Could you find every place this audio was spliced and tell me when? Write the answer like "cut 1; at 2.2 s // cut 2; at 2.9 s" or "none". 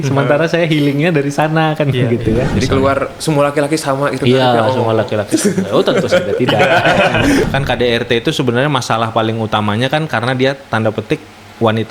cut 1; at 2.5 s // cut 2; at 7.4 s